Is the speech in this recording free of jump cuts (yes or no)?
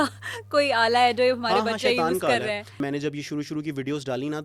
no